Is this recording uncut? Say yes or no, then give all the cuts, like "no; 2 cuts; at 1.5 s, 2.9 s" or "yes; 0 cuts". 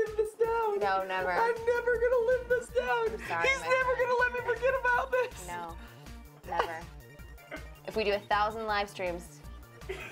yes; 0 cuts